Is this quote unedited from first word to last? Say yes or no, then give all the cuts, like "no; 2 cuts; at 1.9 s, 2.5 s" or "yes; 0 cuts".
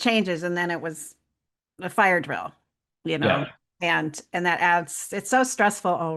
yes; 0 cuts